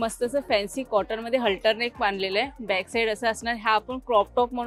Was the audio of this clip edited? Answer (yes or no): no